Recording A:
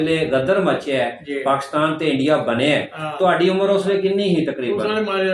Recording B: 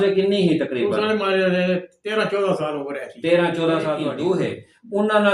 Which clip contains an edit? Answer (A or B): B